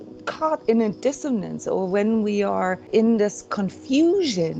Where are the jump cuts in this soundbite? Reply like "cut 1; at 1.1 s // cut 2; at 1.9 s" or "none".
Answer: cut 1; at 2.9 s